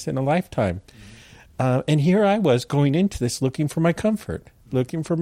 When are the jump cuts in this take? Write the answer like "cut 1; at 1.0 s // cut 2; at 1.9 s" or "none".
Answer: none